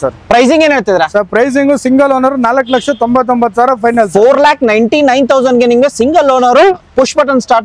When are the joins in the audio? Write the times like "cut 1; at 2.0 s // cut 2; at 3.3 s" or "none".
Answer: none